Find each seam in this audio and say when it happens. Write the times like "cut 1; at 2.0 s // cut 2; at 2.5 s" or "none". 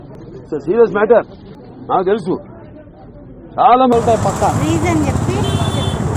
cut 1; at 3.9 s